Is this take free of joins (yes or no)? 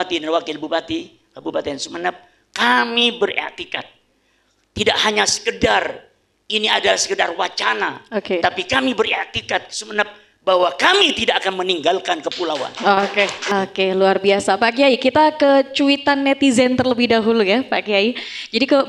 no